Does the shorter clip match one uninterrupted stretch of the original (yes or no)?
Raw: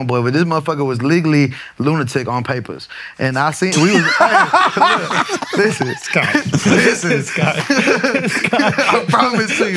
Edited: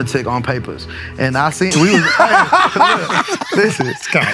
yes